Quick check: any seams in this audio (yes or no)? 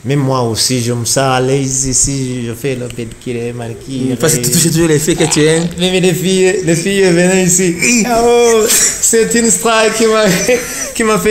no